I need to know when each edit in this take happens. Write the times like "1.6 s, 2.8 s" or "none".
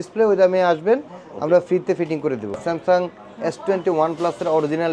2.6 s